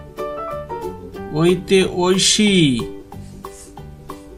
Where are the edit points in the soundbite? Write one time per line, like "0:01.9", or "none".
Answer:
none